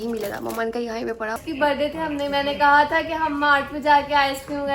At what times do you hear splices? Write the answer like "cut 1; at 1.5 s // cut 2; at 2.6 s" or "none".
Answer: cut 1; at 1.4 s